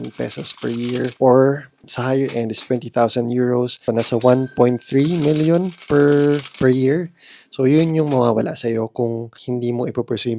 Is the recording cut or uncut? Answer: cut